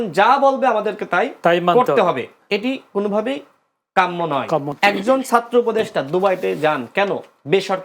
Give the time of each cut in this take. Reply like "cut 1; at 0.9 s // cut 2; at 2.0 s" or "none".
cut 1; at 4.7 s